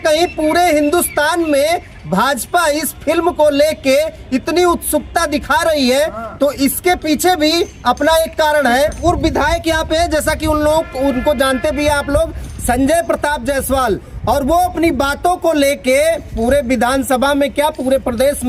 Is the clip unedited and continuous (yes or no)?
no